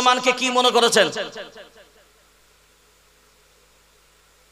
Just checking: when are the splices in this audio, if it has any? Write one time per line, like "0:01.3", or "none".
none